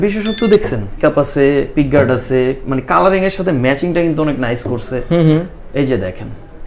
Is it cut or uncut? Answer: cut